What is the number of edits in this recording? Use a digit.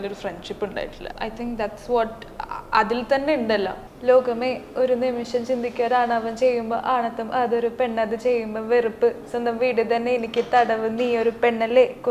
2